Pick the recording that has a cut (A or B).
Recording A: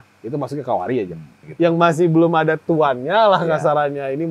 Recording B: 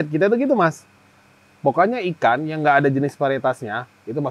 A